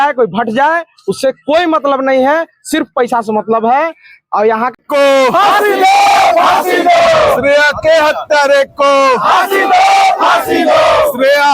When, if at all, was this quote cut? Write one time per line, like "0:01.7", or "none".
0:04.7